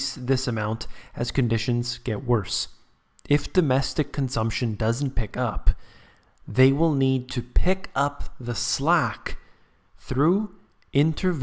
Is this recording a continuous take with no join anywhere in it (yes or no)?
yes